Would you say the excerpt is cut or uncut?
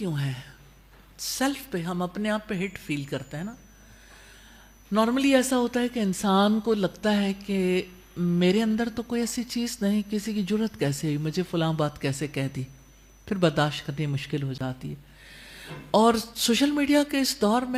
uncut